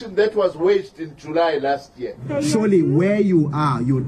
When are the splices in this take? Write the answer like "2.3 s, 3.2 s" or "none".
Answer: 2.2 s

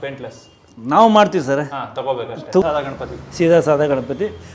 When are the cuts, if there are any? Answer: 2.6 s

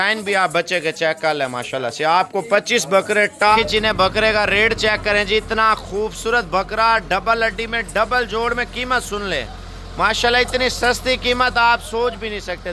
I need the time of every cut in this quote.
3.6 s

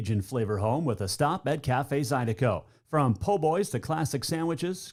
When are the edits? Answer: none

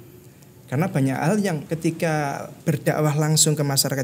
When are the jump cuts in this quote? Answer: 1.6 s, 2.5 s

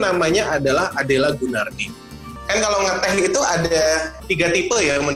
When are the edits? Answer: 2.2 s, 4.2 s

